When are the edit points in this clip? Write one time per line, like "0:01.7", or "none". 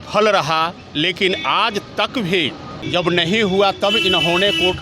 0:02.7